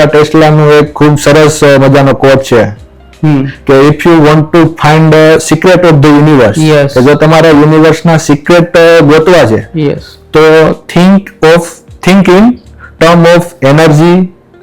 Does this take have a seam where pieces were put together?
no; 0 cuts

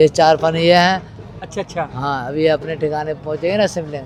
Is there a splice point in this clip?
no; 0 cuts

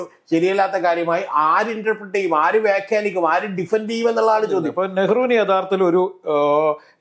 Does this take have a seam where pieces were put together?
yes; 1 cut; at 4.7 s

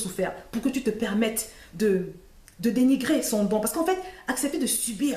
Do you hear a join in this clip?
no; 0 cuts

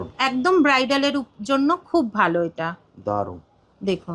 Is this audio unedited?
yes; 0 cuts

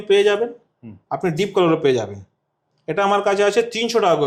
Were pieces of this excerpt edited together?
no; 0 cuts

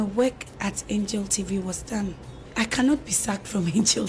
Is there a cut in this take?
yes; 1 cut; at 2.4 s

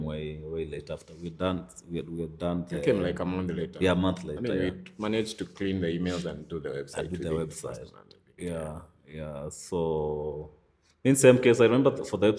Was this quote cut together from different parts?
no; 0 cuts

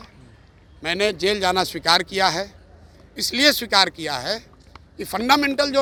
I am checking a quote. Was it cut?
no; 0 cuts

